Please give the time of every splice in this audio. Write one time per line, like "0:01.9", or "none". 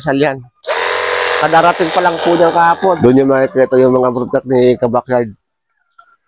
0:03.0